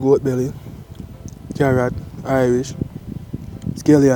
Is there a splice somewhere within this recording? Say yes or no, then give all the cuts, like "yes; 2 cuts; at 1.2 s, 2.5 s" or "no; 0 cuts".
no; 0 cuts